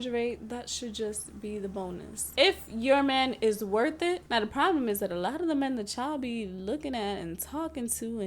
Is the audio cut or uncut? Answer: cut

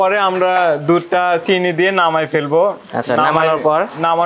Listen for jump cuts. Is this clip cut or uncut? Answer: uncut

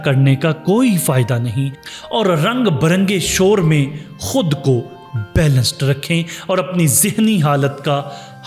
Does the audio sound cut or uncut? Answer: cut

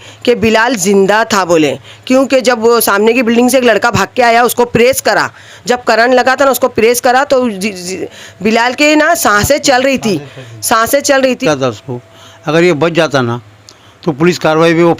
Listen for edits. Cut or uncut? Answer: cut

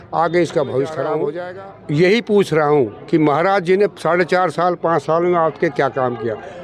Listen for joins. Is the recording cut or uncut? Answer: cut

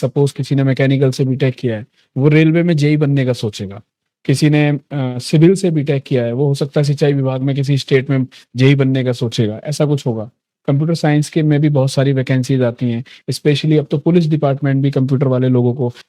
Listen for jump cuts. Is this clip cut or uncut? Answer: uncut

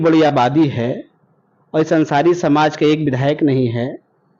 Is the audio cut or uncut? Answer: uncut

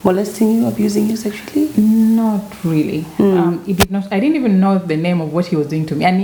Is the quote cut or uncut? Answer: uncut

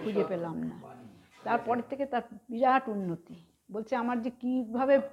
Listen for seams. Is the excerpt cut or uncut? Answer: uncut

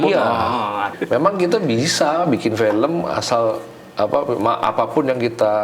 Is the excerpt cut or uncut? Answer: cut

